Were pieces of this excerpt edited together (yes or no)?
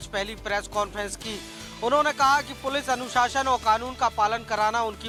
no